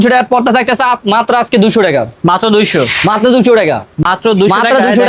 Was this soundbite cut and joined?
no; 0 cuts

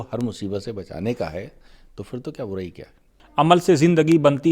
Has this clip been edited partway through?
yes; 1 cut; at 3.1 s

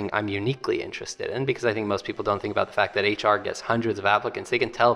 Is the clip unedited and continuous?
yes; 0 cuts

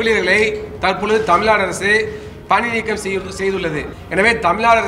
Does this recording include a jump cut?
yes; 1 cut; at 3.9 s

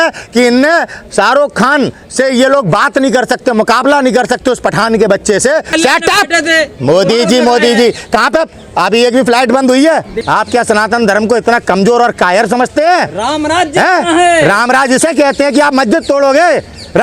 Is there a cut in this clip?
yes; 2 cuts; at 5.7 s, 10.1 s

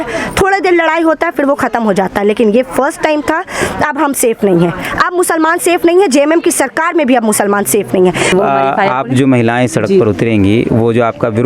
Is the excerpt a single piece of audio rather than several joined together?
no; 1 cut; at 8.3 s

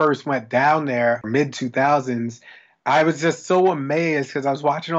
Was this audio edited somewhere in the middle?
yes; 1 cut; at 1.2 s

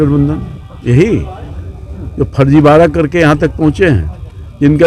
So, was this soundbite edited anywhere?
no; 0 cuts

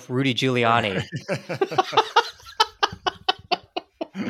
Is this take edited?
no; 0 cuts

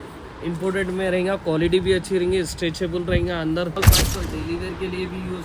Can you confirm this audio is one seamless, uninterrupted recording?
no; 1 cut; at 3.7 s

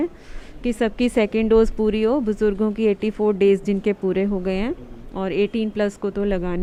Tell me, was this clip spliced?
no; 0 cuts

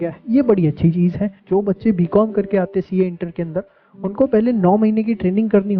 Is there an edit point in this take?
yes; 1 cut; at 1.3 s

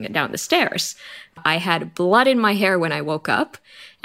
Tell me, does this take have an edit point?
yes; 1 cut; at 1.3 s

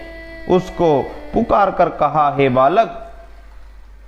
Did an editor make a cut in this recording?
no; 0 cuts

